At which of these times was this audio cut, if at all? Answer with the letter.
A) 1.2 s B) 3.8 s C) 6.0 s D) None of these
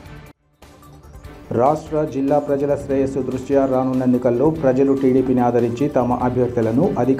A